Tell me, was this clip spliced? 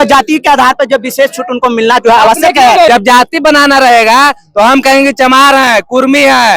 yes; 1 cut; at 2.9 s

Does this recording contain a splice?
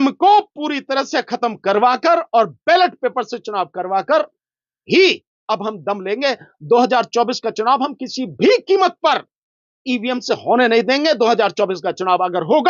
no; 0 cuts

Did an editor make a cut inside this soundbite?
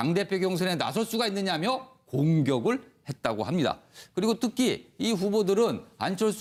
no; 0 cuts

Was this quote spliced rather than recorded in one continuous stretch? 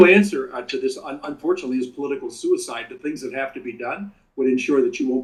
no; 0 cuts

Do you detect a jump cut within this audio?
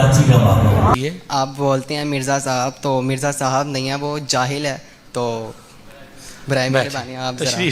yes; 1 cut; at 0.9 s

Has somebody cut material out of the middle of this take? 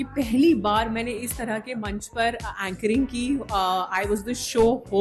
no; 0 cuts

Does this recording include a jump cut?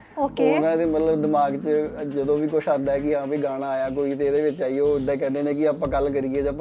no; 0 cuts

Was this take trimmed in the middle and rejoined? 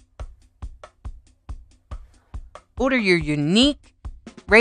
yes; 1 cut; at 2.8 s

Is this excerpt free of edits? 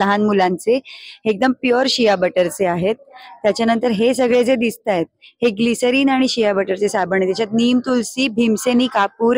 yes; 0 cuts

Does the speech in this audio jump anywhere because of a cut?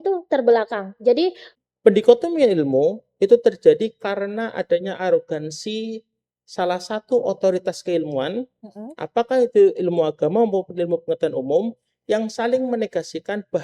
yes; 1 cut; at 1.5 s

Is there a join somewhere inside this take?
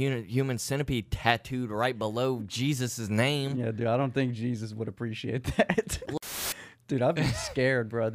yes; 1 cut; at 6.2 s

